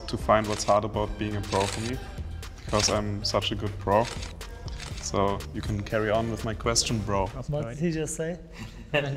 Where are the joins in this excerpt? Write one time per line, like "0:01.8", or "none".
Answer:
none